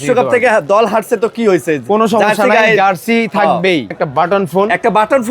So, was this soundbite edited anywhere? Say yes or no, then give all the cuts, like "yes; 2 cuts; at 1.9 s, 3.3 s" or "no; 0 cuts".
yes; 1 cut; at 3.9 s